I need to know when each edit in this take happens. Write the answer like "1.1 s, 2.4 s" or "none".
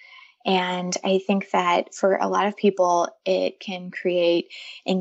none